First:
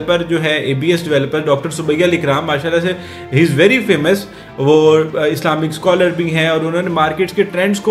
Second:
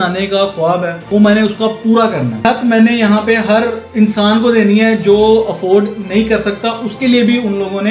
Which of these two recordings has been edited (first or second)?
second